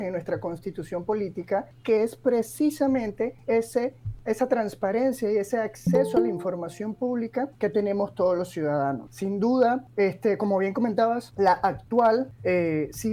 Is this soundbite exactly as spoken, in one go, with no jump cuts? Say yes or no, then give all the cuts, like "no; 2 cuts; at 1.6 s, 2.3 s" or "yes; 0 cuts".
no; 8 cuts; at 1.7 s, 3.4 s, 4.1 s, 7.5 s, 9.1 s, 9.9 s, 11.3 s, 12.3 s